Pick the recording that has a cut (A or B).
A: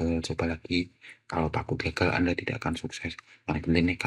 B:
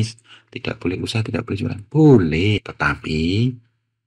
B